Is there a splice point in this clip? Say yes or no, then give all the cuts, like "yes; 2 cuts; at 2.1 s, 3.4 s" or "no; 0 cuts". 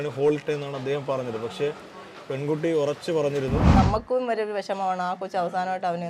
yes; 1 cut; at 3.7 s